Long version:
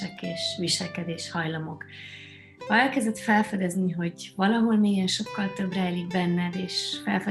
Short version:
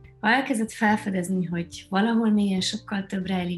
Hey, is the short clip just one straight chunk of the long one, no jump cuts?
yes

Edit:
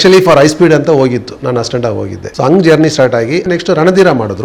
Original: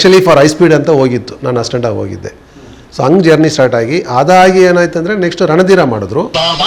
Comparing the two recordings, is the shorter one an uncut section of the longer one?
no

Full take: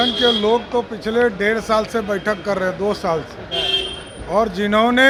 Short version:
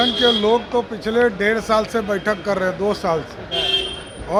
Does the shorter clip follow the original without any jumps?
yes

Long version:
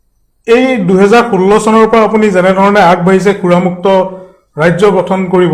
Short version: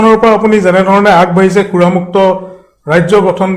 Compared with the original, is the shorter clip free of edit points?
yes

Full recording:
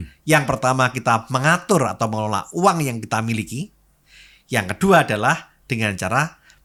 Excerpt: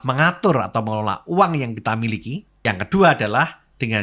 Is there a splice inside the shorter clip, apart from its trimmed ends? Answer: yes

